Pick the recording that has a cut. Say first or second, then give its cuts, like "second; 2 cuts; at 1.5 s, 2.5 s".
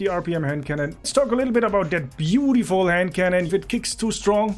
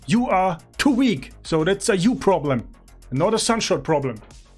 first; 2 cuts; at 1.1 s, 3.5 s